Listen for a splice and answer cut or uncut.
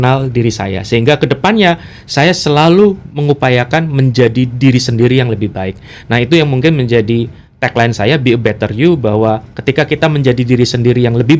uncut